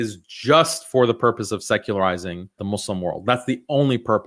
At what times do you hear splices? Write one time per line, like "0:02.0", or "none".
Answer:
0:02.6